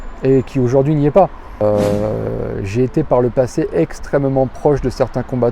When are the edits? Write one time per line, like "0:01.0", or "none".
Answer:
0:01.6